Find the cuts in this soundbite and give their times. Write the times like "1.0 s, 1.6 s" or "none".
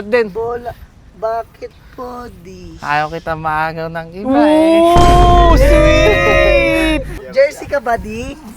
7.2 s